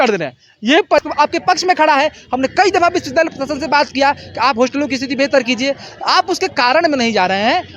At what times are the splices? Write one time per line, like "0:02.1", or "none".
0:01.0